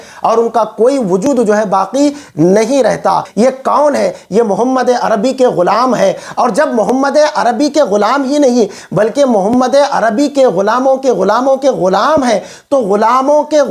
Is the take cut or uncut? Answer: cut